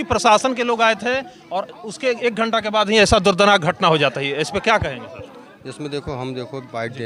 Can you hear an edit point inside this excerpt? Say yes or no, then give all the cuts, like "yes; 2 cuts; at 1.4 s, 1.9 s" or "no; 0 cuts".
no; 0 cuts